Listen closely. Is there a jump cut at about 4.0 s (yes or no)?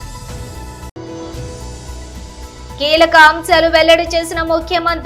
no